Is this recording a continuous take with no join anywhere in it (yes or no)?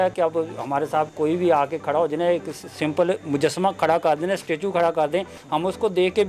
yes